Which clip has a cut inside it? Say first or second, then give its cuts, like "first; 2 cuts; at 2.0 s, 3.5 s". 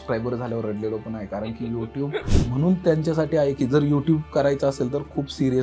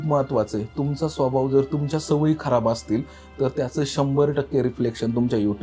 first; 1 cut; at 2.4 s